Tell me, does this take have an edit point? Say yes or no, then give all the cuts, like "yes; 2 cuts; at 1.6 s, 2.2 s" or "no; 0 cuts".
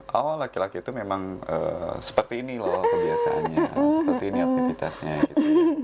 no; 0 cuts